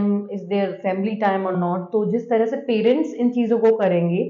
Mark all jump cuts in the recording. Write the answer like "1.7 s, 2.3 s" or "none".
none